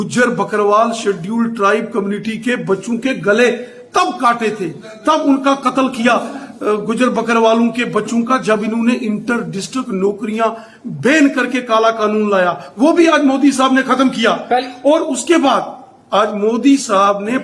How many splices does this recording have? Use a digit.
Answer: 0